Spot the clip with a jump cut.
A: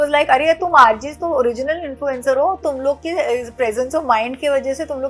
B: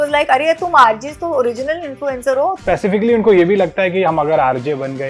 B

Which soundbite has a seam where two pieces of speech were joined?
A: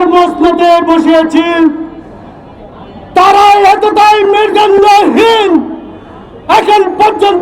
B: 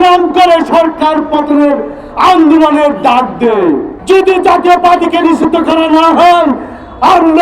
B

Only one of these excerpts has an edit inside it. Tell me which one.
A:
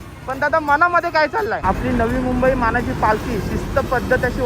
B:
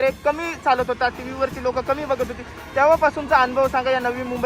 A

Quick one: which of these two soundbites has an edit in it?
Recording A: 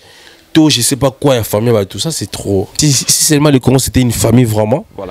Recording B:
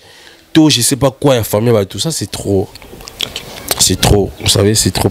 A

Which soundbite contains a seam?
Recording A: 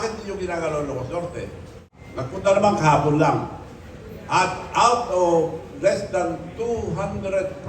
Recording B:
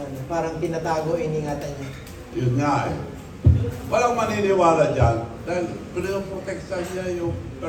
A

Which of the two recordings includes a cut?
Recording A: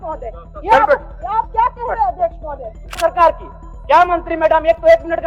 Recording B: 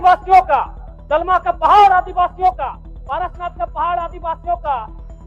A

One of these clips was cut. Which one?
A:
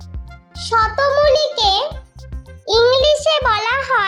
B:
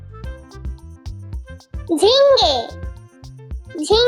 B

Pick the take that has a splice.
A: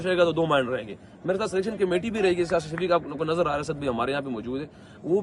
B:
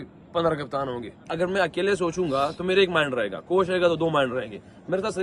B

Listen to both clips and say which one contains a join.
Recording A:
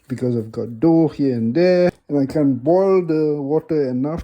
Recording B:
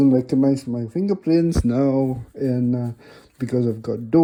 A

